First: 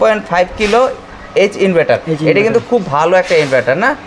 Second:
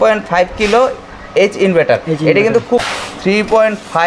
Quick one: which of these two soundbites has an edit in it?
second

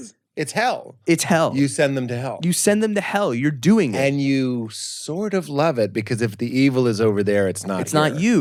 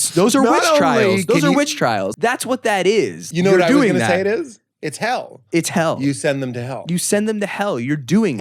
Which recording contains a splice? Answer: second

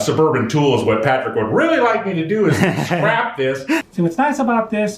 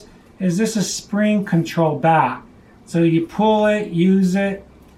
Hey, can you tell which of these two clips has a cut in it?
first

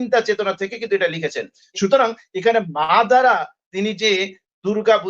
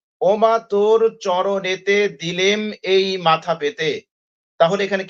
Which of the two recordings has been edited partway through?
first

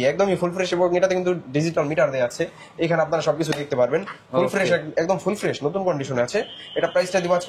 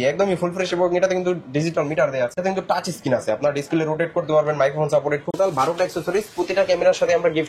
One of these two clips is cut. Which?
second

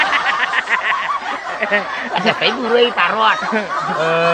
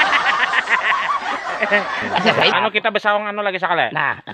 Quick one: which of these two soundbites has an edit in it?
second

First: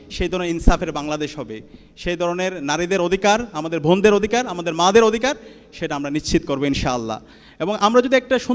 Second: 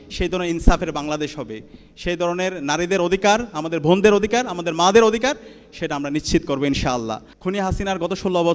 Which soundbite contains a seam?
second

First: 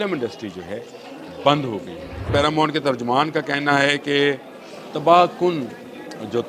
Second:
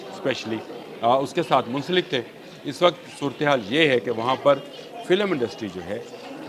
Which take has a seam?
first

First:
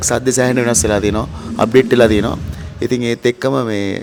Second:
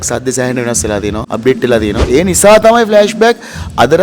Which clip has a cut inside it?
second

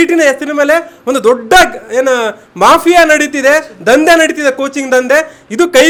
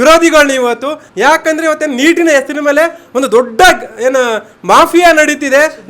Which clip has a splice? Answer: second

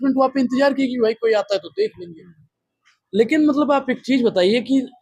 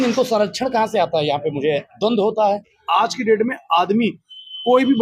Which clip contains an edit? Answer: second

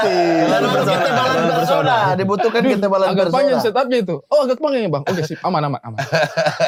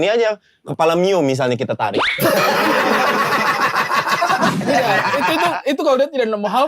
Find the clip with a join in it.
second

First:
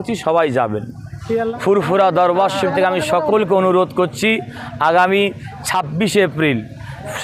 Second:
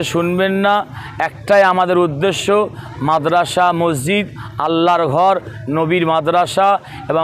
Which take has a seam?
first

